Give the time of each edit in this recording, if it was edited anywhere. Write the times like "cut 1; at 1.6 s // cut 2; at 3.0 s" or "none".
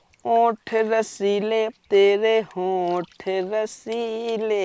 none